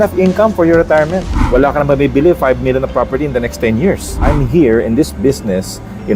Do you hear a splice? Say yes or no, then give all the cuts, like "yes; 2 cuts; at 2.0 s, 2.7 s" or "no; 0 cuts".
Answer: yes; 2 cuts; at 1.3 s, 4.2 s